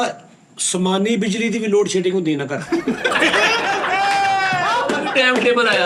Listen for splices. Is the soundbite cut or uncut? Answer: uncut